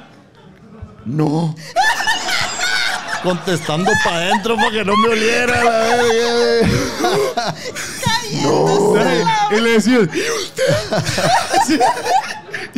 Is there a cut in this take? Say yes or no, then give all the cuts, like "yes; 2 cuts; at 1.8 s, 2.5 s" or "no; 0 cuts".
no; 0 cuts